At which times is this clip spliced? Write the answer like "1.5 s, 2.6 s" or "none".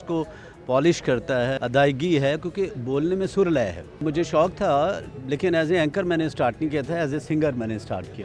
1.6 s, 4.0 s